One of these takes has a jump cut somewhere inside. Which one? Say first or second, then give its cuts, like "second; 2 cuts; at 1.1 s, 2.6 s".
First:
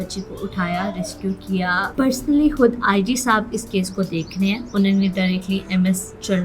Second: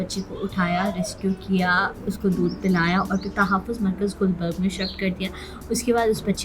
first; 1 cut; at 1.9 s